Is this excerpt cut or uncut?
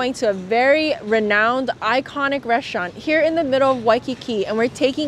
uncut